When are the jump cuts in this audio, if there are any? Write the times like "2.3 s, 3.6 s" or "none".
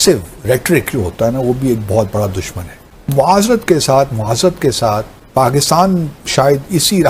2.8 s, 5.2 s

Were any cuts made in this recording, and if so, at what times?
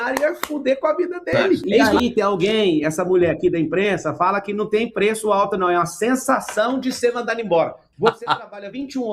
1.6 s, 7.8 s

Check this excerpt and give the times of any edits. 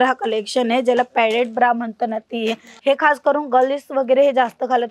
2.7 s

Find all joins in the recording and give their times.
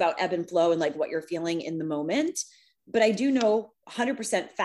none

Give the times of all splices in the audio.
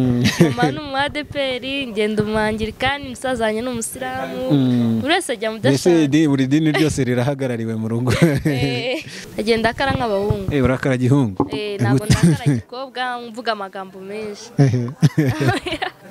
9.2 s

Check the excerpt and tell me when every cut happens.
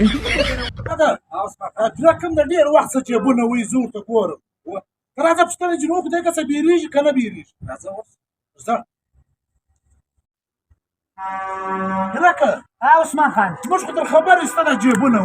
1.0 s

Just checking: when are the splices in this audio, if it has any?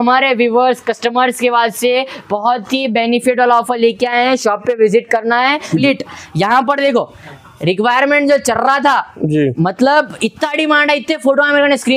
5.8 s

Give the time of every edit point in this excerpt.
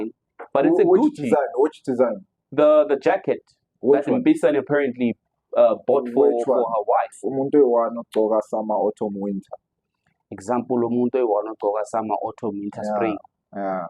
7.2 s

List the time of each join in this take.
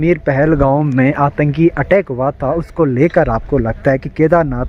none

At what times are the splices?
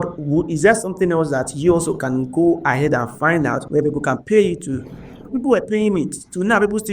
3.6 s

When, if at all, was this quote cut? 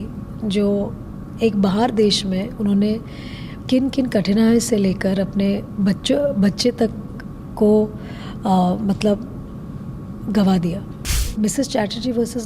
11.2 s

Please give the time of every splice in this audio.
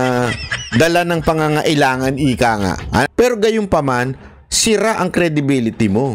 3.1 s

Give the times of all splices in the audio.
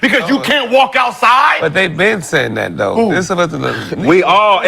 none

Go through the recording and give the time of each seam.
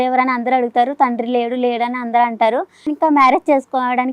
2.9 s

